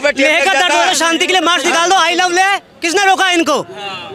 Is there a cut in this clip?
no; 0 cuts

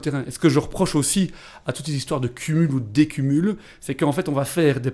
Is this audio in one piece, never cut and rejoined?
yes; 0 cuts

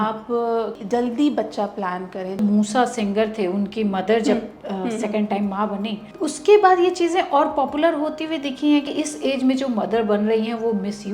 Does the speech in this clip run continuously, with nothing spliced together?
no; 4 cuts; at 0.8 s, 2.4 s, 6.1 s, 8.8 s

